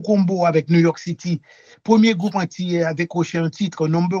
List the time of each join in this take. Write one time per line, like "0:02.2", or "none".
none